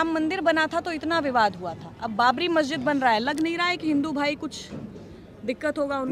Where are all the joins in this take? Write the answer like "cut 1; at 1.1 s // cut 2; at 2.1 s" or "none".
none